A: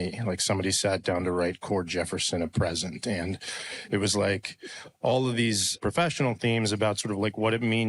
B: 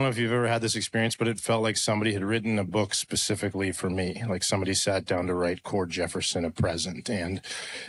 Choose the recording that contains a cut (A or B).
A